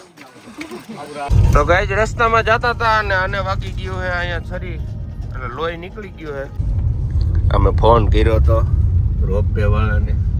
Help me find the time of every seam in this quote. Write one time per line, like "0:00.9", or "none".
0:01.3
0:06.5